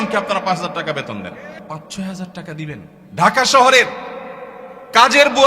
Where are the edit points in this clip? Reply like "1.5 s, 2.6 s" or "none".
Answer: 1.6 s, 3.0 s